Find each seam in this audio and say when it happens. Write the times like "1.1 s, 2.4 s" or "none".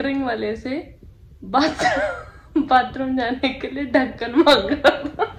none